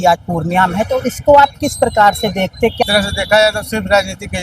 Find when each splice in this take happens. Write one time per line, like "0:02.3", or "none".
0:02.8